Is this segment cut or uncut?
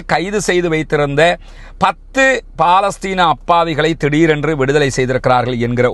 uncut